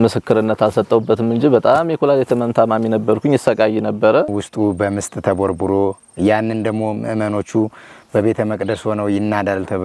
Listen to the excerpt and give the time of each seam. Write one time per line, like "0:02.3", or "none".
0:04.4